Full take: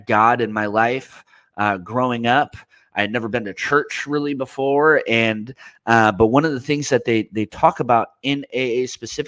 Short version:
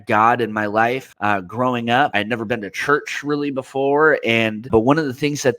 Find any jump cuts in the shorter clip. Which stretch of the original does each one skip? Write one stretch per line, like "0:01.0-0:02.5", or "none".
0:01.1-0:01.5
0:02.5-0:03.0
0:05.5-0:06.1